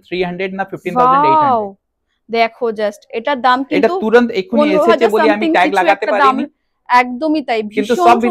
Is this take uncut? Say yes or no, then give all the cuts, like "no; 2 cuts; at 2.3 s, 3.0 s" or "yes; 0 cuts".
yes; 0 cuts